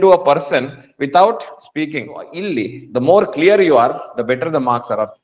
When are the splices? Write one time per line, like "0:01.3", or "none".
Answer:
0:02.3